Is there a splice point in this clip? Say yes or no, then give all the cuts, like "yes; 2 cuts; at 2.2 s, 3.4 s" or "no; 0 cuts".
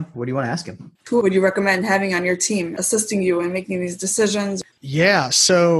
yes; 3 cuts; at 1.0 s, 2.7 s, 4.6 s